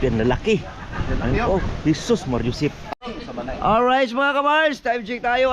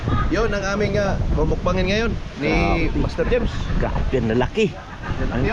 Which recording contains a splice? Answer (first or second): first